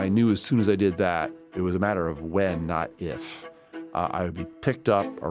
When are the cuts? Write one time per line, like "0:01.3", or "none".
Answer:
0:01.4